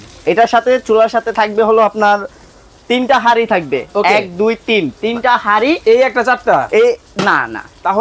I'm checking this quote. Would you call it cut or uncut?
uncut